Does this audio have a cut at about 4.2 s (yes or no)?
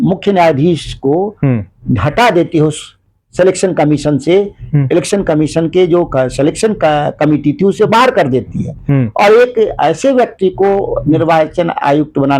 no